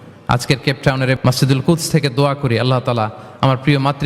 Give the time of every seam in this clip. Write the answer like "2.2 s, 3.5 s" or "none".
1.2 s